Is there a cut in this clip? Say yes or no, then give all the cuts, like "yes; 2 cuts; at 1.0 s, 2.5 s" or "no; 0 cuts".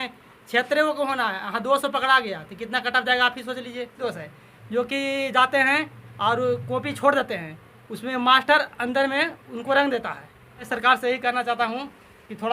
yes; 2 cuts; at 4.0 s, 10.7 s